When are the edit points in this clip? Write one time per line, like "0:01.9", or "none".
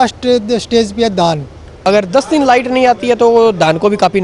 0:01.7